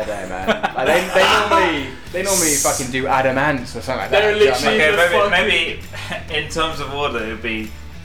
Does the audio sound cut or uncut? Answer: uncut